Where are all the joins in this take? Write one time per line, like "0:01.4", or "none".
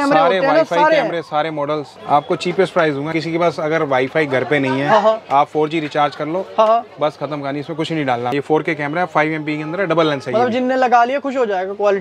0:02.0
0:03.1
0:08.3

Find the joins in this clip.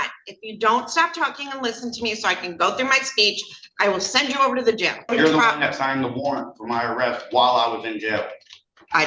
0:05.1

